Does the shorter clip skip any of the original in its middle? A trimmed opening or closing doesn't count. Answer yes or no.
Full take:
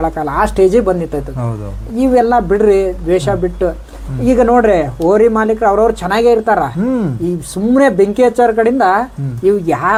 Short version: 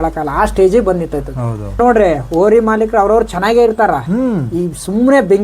yes